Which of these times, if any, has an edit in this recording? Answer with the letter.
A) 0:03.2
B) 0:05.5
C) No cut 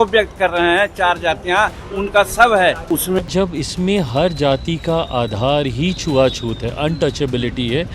A